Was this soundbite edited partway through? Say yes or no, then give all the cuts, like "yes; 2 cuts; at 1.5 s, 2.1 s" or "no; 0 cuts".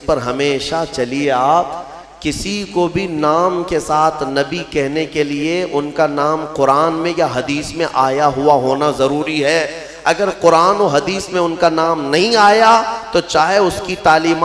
no; 0 cuts